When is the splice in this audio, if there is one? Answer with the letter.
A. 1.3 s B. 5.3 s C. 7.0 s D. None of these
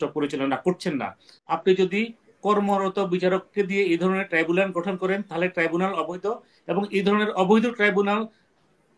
A